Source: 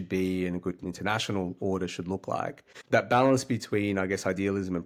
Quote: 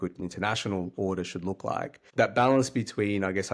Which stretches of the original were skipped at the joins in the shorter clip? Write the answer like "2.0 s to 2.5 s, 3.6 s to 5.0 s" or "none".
2.6 s to 2.7 s